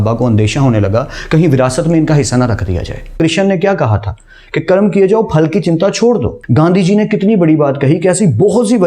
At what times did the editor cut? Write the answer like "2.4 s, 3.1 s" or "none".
3.1 s, 6.4 s

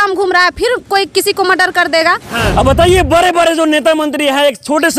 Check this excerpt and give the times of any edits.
2.4 s

